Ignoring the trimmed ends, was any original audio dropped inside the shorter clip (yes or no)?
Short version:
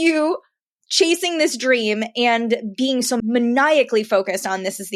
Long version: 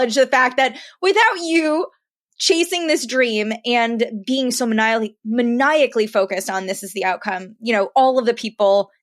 yes